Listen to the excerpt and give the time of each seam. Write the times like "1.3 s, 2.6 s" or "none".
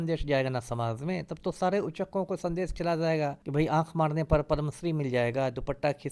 3.4 s